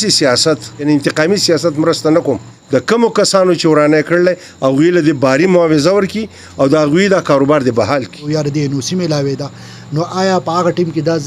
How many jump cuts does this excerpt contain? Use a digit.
3